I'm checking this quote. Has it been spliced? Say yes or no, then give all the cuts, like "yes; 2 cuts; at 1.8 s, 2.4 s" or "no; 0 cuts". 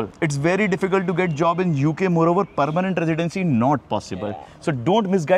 no; 0 cuts